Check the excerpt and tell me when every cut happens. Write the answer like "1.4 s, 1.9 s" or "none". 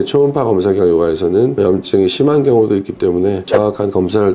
none